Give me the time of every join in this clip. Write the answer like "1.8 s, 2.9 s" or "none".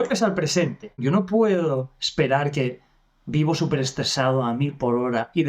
1.0 s